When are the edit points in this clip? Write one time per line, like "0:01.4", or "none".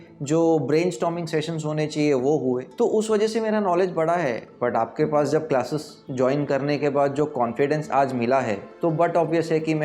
0:02.7
0:04.5
0:08.6